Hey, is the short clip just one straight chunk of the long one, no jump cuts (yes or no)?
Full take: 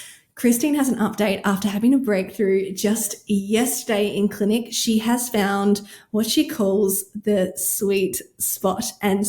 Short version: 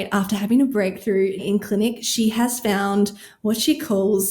no